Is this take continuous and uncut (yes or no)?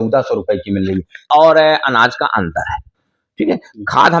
no